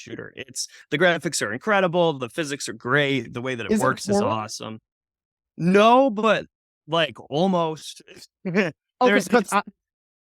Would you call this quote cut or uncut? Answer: uncut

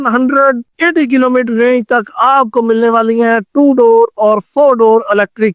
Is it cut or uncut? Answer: uncut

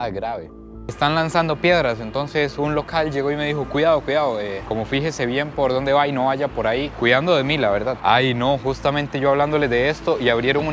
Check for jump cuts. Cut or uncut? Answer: cut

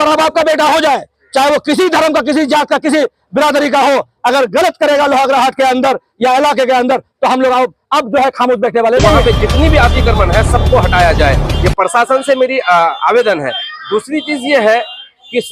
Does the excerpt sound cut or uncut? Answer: cut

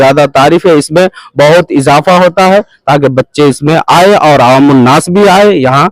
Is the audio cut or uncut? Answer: uncut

